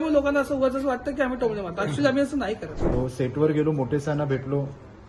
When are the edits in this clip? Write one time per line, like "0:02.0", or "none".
0:02.8